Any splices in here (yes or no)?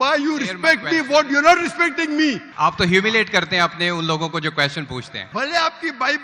yes